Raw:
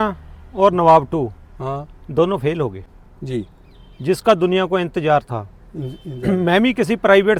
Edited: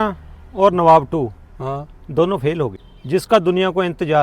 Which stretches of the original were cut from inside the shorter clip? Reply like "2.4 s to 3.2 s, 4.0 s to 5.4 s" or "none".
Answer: 2.9 s to 3.8 s